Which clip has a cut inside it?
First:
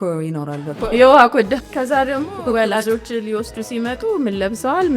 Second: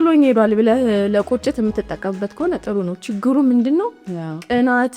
first; 2 cuts; at 0.9 s, 1.7 s

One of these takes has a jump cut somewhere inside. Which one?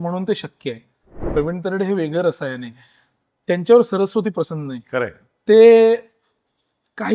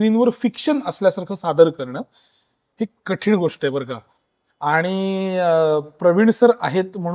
first; 1 cut; at 1.2 s

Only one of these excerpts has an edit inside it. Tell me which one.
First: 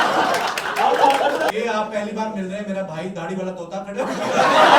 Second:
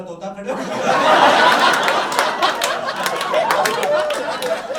first; 1 cut; at 1.5 s

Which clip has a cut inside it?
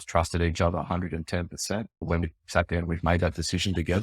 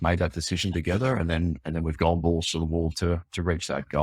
first; 1 cut; at 2.1 s

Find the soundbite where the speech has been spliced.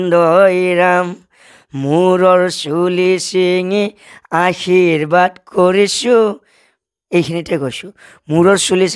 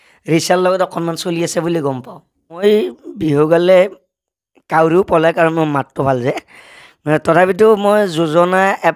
second; 1 cut; at 2.6 s

